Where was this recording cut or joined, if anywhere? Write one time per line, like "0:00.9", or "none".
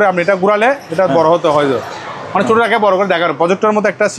none